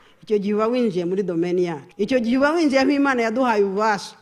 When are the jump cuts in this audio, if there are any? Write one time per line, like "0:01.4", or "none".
0:01.8